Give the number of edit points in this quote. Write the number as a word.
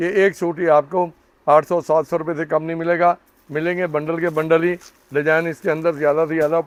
zero